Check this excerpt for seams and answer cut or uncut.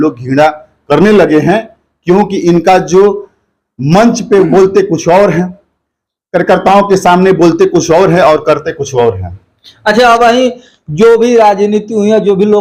uncut